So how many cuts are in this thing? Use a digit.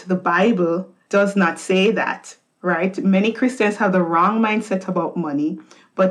1